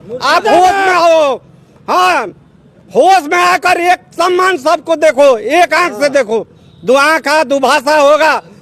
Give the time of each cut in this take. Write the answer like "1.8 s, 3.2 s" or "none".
none